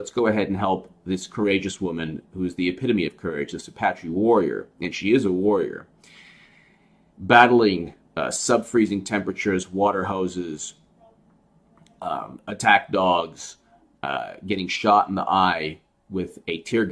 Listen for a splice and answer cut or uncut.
cut